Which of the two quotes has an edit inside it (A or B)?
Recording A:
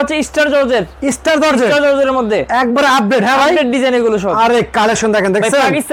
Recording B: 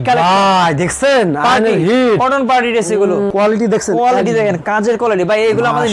B